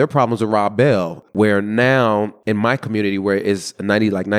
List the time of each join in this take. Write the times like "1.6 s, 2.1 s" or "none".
1.2 s